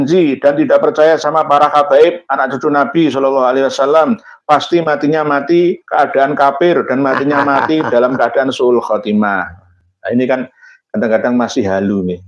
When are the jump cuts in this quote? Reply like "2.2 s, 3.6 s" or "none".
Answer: none